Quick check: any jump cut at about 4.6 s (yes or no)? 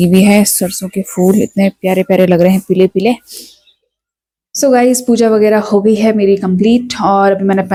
no